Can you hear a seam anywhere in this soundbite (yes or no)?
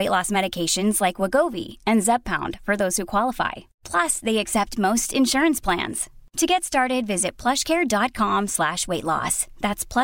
no